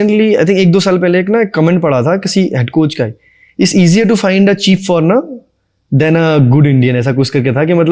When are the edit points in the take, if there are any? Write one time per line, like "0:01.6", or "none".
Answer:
none